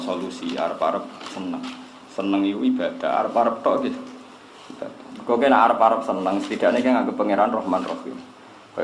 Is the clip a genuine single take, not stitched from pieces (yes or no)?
yes